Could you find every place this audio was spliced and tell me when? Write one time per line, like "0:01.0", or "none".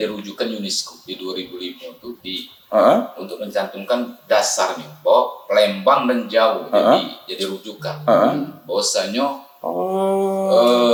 none